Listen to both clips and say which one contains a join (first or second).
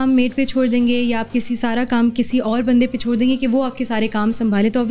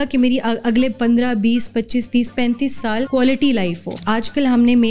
second